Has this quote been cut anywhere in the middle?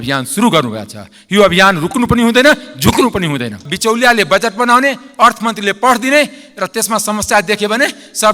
yes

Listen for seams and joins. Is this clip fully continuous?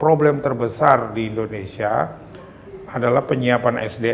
yes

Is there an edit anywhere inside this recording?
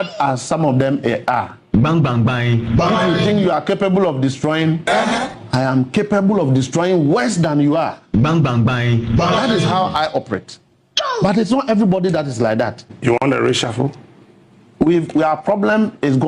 yes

